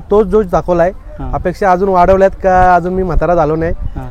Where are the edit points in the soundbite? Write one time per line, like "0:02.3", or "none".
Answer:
none